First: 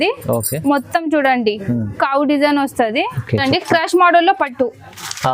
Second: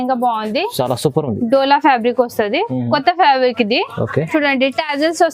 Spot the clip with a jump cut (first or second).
first